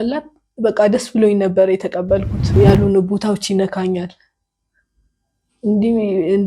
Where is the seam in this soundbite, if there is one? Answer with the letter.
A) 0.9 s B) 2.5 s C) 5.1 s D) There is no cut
B